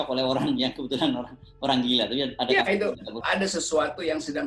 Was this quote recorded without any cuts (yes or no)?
no